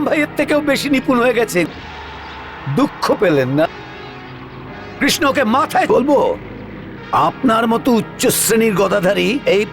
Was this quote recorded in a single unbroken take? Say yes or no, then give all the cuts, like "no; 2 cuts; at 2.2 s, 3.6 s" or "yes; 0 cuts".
no; 3 cuts; at 1.7 s, 3.7 s, 5.9 s